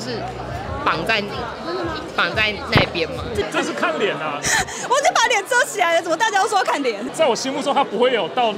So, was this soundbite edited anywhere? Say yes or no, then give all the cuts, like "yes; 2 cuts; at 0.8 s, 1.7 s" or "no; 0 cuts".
yes; 1 cut; at 3.4 s